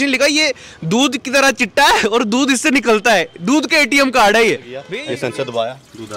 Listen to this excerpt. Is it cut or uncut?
cut